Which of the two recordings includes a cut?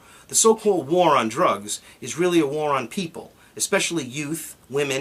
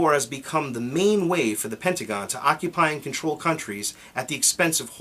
second; 1 cut; at 3.2 s

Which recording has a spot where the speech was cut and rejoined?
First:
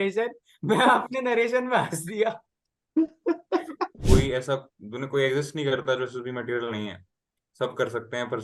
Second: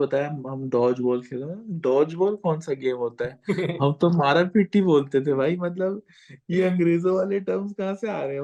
first; 1 cut; at 4.0 s

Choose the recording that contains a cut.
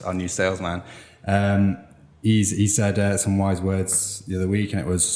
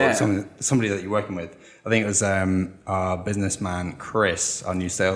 second; 1 cut; at 2.8 s

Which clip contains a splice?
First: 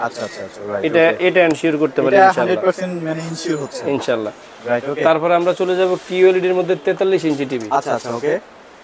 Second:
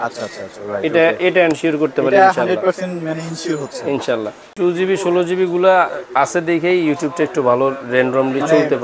second; 1 cut; at 4.5 s

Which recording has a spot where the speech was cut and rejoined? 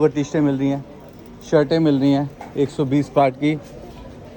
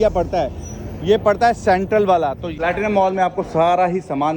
second; 1 cut; at 2.5 s

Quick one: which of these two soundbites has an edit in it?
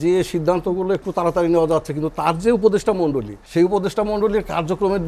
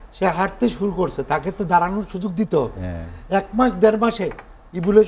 first; 1 cut; at 3.3 s

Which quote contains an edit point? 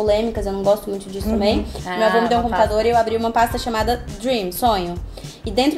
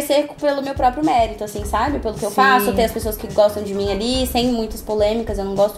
first; 1 cut; at 1.8 s

